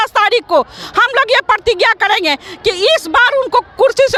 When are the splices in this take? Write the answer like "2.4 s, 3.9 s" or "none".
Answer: none